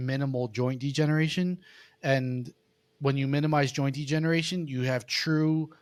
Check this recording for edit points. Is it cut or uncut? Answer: uncut